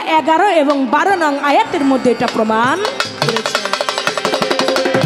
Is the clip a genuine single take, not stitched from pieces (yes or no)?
yes